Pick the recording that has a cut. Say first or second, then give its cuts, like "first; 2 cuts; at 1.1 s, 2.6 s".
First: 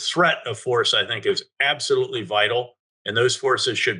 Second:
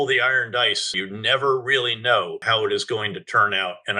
second; 2 cuts; at 0.9 s, 2.4 s